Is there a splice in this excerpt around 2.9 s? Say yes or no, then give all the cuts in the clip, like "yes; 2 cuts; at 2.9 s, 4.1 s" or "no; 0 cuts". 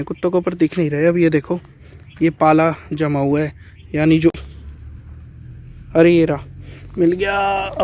no; 1 cut; at 4.3 s